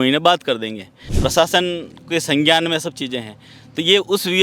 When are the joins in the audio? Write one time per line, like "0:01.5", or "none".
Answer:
0:01.2